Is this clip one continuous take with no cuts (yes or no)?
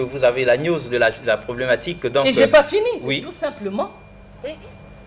no